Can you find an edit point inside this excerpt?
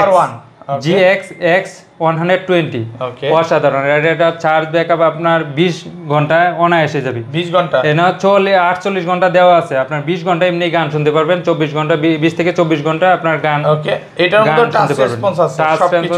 no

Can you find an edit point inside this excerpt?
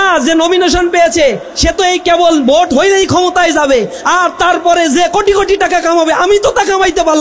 no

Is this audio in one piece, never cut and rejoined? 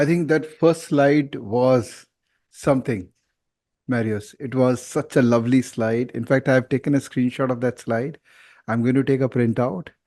yes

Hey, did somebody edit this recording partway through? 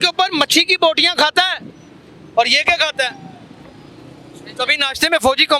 no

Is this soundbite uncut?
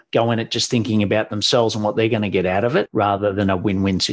no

